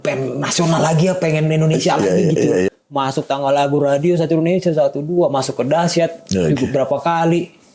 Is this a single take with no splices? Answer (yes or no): no